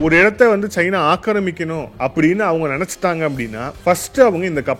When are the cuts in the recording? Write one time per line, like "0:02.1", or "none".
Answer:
0:01.8
0:03.6